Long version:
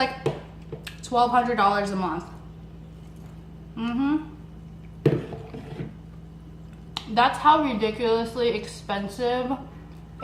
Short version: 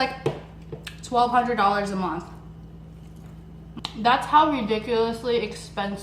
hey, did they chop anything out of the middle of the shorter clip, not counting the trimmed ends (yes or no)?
yes